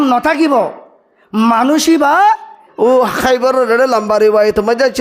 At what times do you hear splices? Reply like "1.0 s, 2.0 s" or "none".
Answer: 2.6 s